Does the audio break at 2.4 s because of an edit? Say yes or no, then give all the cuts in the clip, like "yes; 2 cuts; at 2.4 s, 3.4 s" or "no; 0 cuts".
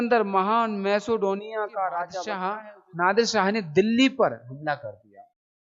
yes; 1 cut; at 2.4 s